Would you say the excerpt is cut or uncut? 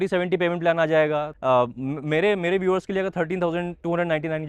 cut